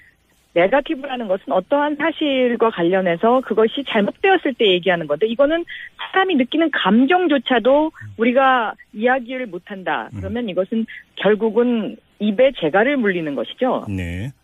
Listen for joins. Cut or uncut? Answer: cut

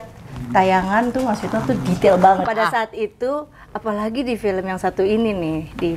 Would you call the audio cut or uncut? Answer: cut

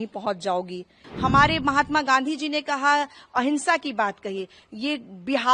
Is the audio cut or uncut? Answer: cut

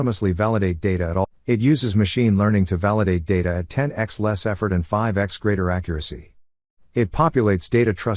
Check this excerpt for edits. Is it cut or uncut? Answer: cut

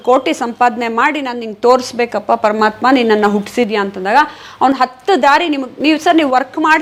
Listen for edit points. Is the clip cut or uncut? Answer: uncut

